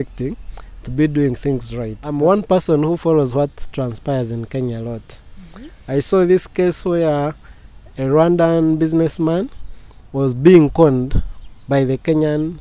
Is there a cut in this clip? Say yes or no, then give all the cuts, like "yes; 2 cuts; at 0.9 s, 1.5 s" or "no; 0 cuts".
yes; 1 cut; at 2.0 s